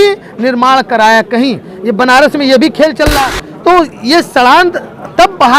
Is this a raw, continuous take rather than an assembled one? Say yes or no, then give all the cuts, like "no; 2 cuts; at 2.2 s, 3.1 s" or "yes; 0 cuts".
no; 1 cut; at 3.1 s